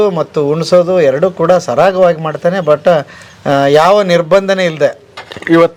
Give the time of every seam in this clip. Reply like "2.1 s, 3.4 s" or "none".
none